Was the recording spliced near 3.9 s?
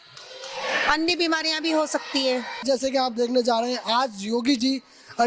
no; 1 cut; at 2.6 s

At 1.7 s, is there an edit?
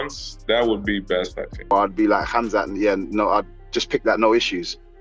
yes; 1 cut; at 1.7 s

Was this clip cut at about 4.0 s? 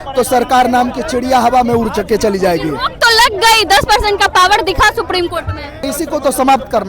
no; 1 cut; at 5.9 s

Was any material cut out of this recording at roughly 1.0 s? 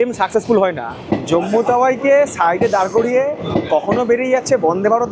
yes; 1 cut; at 1.0 s

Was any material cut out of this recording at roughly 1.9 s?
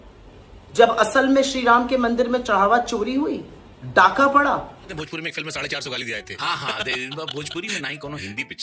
no; 1 cut; at 4.8 s

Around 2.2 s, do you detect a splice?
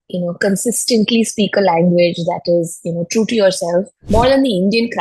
no; 1 cut; at 4.0 s

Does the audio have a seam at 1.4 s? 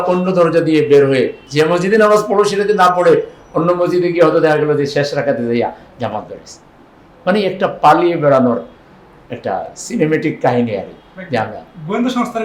yes; 1 cut; at 1.4 s

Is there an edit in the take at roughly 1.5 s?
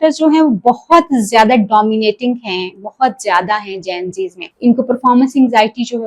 no; 1 cut; at 4.4 s

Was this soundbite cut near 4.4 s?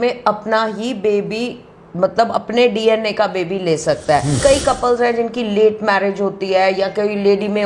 yes; 1 cut; at 4.4 s

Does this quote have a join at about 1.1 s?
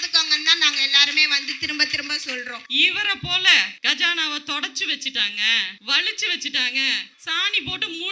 no; 4 cuts; at 2.6 s, 3.7 s, 5.7 s, 7.1 s

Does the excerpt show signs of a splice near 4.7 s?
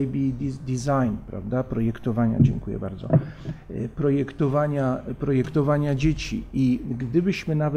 yes; 1 cut; at 4.7 s

